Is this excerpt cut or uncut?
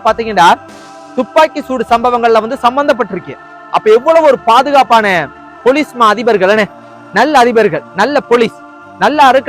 uncut